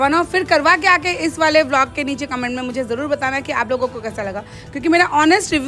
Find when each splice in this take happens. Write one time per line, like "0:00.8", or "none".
none